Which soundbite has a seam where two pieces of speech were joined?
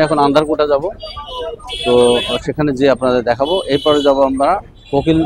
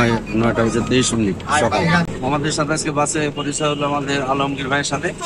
second; 1 cut; at 2.1 s

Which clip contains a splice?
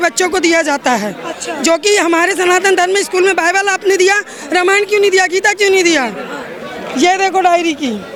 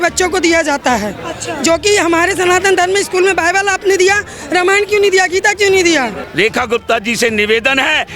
second; 1 cut; at 6.2 s

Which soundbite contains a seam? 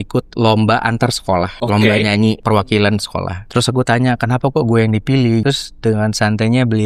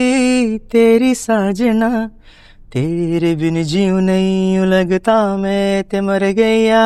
first; 4 cuts; at 1.5 s, 2.4 s, 3.4 s, 5.4 s

